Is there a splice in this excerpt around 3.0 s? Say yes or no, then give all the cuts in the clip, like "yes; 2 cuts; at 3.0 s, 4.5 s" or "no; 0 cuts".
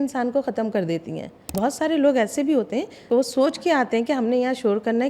yes; 2 cuts; at 1.6 s, 3.0 s